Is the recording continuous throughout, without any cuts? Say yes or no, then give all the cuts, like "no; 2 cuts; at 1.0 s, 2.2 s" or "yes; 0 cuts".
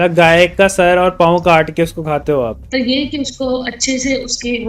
no; 1 cut; at 2.6 s